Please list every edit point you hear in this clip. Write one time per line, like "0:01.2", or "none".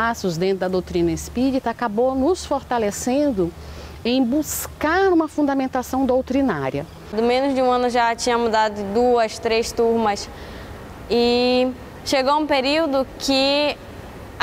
0:07.1